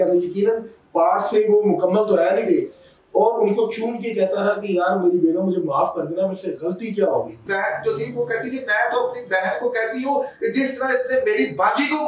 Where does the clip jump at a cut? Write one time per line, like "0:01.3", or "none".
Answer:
0:07.4